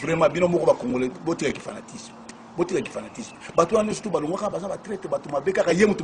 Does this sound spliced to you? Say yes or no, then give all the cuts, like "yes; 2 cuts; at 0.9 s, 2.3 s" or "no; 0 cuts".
no; 0 cuts